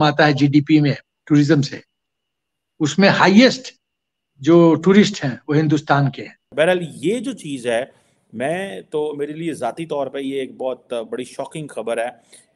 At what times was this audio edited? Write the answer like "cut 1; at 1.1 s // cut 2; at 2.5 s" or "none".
cut 1; at 6.4 s